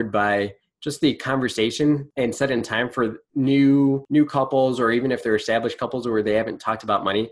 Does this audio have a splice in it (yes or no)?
yes